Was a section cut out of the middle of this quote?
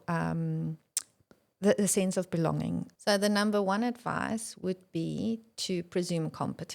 yes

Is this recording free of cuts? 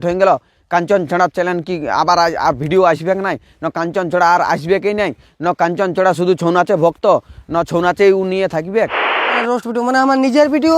no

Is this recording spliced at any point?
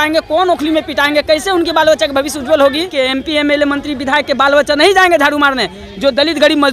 yes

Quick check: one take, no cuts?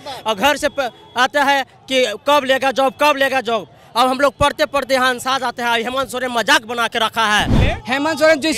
no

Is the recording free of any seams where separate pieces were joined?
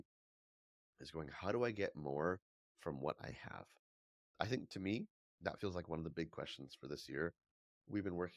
no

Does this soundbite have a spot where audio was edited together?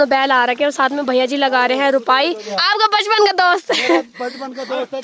yes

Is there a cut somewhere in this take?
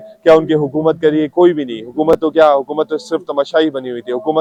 no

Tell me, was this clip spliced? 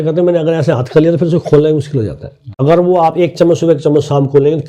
yes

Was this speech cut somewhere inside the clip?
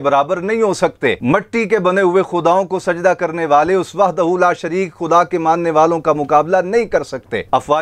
no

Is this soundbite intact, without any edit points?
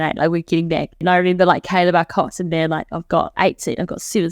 no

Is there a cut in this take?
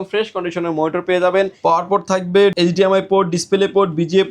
yes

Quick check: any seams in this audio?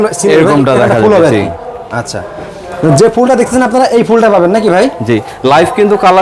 no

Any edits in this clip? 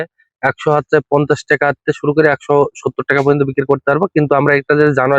no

